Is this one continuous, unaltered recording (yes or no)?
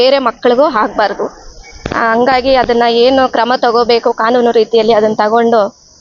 yes